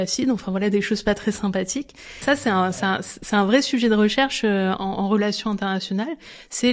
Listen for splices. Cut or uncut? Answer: cut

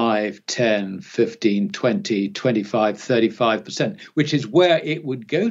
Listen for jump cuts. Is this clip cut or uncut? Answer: uncut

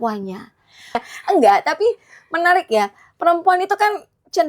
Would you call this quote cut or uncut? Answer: cut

